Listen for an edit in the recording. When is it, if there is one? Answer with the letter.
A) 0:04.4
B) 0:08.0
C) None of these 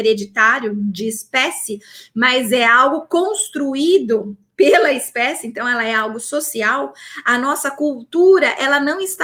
C